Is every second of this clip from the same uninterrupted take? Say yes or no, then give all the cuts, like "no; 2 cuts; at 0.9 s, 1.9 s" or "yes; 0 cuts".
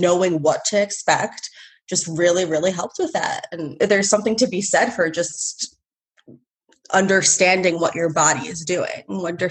yes; 0 cuts